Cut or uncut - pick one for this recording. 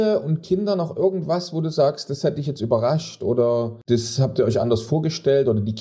cut